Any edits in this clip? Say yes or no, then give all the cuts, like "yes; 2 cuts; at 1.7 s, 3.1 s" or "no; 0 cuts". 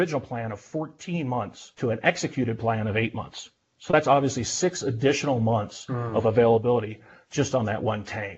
yes; 1 cut; at 1.6 s